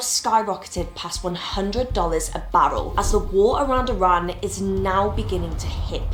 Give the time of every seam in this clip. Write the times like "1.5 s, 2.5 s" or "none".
none